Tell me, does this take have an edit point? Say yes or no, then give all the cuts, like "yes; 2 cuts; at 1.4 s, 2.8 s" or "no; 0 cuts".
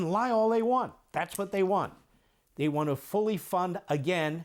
no; 0 cuts